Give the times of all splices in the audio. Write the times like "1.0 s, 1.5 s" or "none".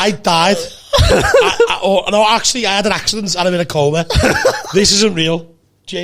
none